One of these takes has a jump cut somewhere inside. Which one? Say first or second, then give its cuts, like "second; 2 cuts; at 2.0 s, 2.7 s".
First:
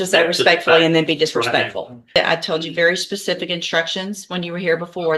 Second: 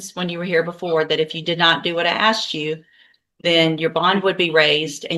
first; 1 cut; at 2.2 s